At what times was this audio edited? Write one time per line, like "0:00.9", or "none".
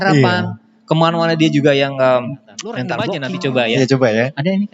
0:03.1